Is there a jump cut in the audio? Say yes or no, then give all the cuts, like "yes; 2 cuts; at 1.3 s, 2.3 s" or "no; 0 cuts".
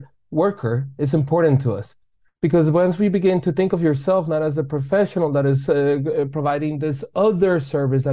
no; 0 cuts